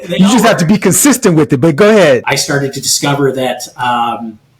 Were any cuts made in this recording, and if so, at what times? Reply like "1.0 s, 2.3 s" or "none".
2.2 s